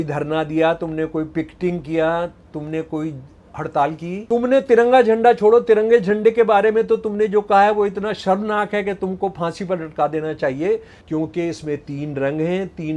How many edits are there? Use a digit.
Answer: 2